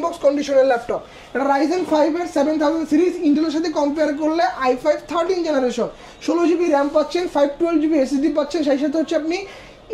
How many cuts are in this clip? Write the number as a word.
zero